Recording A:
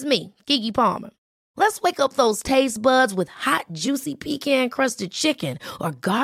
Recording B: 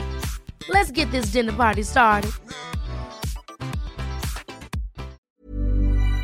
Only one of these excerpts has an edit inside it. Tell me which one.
B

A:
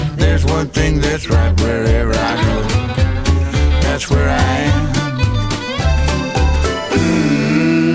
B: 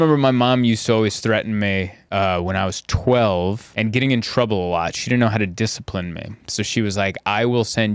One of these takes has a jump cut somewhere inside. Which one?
B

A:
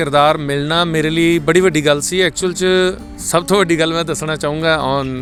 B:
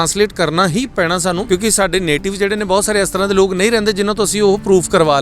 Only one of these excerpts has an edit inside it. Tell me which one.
B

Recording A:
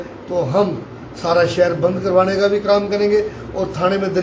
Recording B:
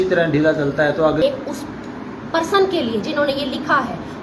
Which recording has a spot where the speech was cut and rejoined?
B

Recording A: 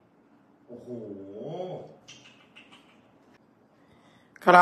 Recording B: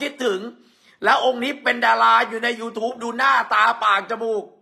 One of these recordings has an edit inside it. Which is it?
A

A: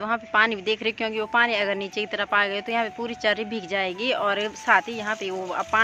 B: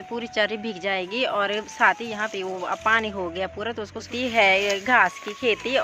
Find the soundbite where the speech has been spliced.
B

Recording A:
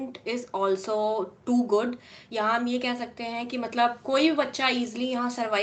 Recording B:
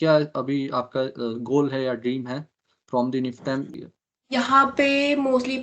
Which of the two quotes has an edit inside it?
B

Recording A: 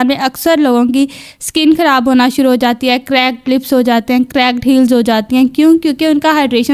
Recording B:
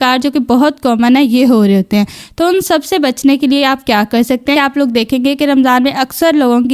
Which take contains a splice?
B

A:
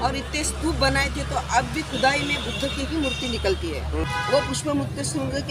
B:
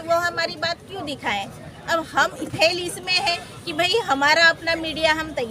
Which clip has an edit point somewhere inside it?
A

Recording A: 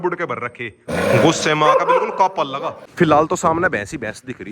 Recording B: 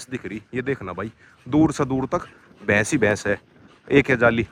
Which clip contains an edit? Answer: A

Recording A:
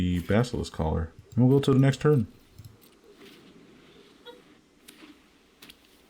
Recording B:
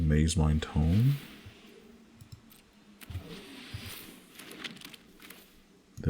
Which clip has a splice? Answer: B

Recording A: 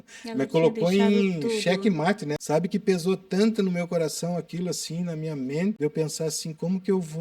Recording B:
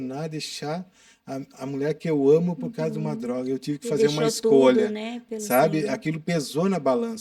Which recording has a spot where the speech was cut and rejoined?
A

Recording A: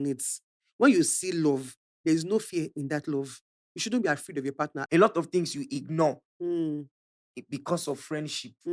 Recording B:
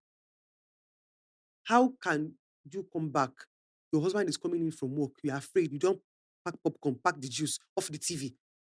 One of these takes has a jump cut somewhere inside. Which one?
A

